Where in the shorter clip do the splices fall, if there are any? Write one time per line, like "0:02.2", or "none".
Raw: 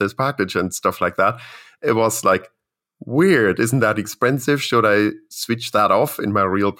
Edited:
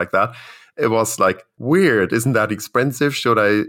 0:01.5